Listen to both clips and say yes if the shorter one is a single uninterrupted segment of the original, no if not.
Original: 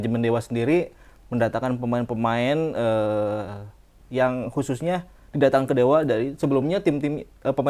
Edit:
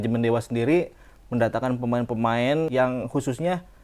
no